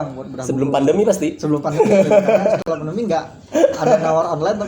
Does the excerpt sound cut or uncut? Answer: uncut